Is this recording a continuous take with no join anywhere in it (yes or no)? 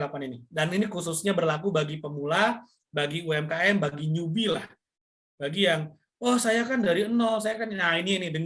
yes